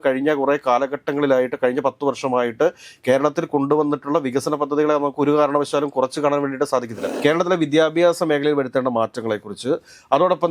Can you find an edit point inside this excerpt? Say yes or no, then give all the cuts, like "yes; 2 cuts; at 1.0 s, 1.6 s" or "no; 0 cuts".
yes; 1 cut; at 7.1 s